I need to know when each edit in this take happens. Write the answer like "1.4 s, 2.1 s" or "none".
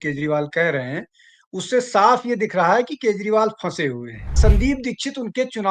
4.4 s